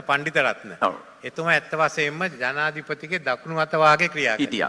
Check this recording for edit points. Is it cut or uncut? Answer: uncut